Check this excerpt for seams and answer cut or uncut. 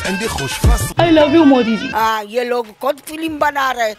cut